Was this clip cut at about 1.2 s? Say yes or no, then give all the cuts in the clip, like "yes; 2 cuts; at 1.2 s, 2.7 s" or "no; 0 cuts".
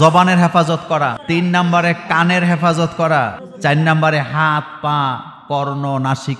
yes; 2 cuts; at 1.2 s, 3.4 s